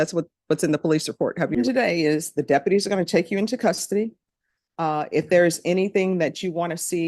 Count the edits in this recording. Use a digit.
1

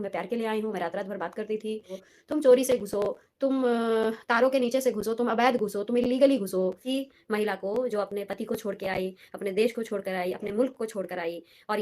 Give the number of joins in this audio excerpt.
2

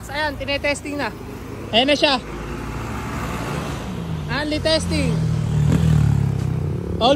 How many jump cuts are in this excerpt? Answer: 0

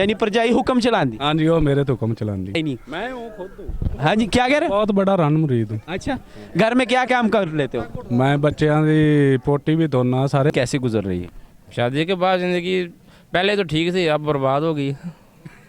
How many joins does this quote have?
2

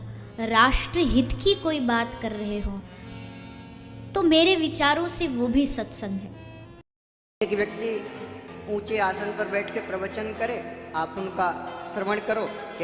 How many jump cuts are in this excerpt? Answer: 1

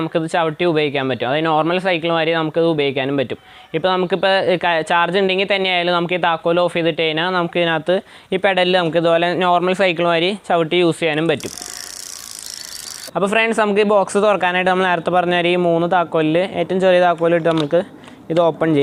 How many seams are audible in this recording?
0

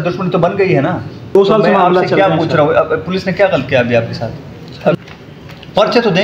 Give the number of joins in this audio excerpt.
2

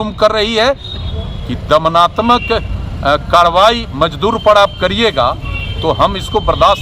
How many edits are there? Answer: 1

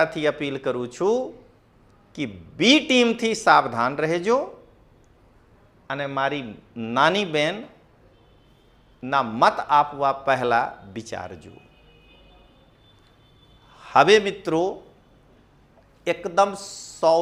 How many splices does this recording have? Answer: 0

